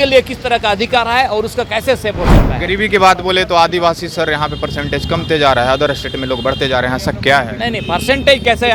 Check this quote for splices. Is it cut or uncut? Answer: uncut